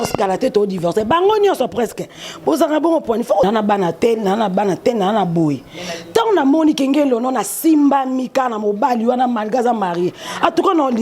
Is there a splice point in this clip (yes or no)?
yes